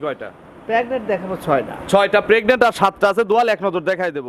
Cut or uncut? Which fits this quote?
uncut